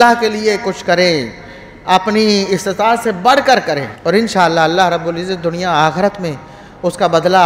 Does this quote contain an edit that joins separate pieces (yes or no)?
yes